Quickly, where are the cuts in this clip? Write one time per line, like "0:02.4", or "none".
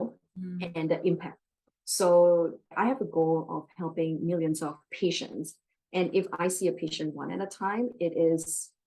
0:02.7